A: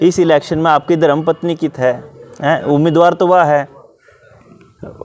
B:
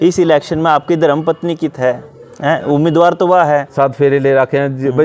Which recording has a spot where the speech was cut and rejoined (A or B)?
B